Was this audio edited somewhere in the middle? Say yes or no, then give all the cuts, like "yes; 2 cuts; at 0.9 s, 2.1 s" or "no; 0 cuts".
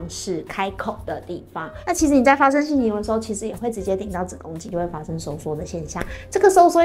yes; 2 cuts; at 1.7 s, 4.7 s